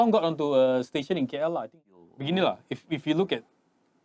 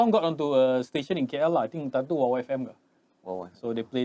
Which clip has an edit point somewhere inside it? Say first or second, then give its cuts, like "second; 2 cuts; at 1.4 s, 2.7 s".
first; 1 cut; at 1.8 s